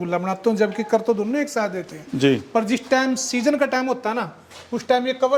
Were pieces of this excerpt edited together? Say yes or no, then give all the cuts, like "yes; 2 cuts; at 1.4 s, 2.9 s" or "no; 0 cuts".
no; 0 cuts